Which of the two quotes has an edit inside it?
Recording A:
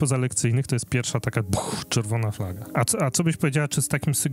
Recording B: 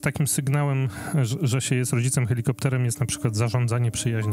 A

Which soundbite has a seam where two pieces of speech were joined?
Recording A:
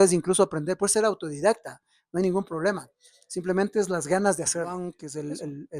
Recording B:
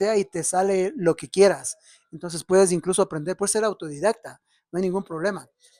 A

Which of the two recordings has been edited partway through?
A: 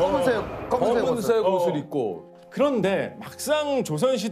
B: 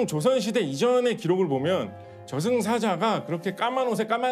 A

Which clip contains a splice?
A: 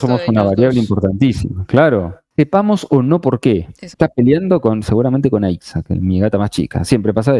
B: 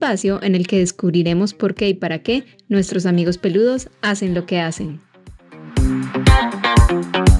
A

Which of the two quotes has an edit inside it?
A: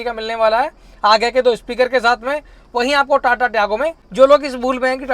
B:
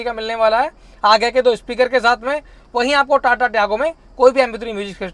A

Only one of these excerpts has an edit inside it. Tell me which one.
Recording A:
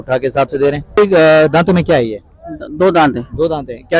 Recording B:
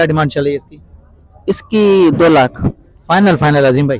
A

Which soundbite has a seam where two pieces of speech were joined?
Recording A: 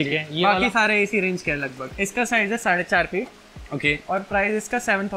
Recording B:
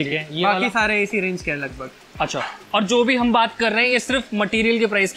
A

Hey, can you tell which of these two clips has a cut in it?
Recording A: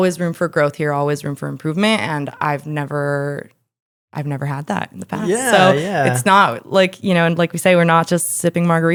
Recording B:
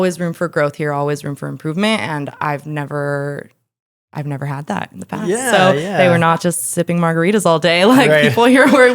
B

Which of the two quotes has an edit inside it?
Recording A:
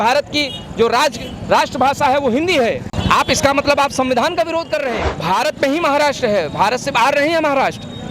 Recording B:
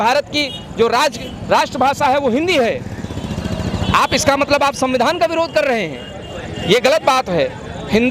A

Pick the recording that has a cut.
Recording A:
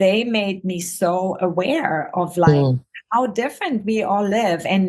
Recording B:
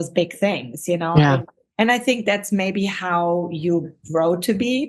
B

